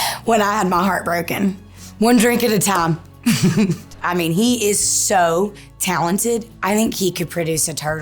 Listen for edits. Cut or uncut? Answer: cut